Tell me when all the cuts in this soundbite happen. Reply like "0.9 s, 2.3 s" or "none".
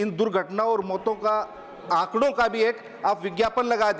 none